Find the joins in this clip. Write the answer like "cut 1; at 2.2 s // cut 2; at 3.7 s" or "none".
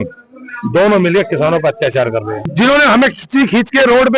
cut 1; at 2.4 s